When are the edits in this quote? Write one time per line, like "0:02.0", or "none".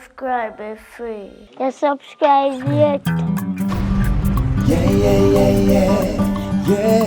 0:03.0